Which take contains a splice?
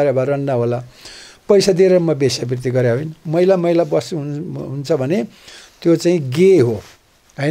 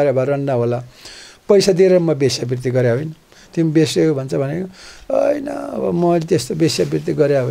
first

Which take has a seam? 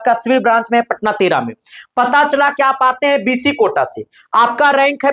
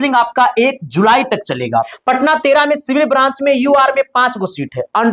second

